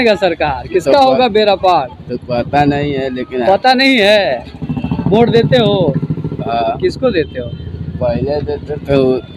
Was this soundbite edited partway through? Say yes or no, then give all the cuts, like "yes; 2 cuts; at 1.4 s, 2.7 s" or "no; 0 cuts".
no; 0 cuts